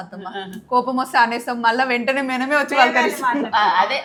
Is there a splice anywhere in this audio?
no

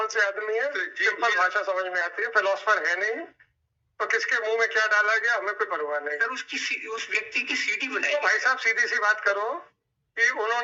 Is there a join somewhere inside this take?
no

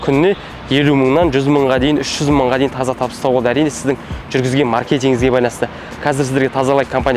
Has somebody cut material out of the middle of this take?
no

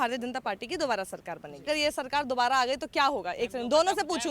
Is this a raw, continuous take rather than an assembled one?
no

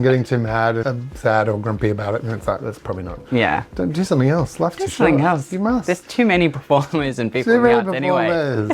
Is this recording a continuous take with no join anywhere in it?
yes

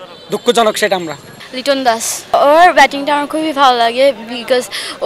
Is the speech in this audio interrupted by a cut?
yes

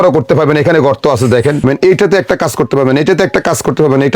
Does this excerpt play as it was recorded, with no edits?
no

